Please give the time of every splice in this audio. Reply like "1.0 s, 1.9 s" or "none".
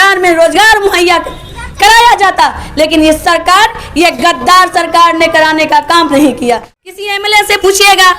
7.0 s